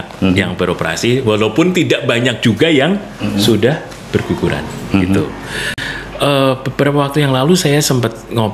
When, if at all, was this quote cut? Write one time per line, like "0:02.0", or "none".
0:05.9